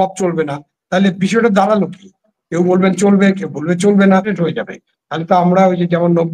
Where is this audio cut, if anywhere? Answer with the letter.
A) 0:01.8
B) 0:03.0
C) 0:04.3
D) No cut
C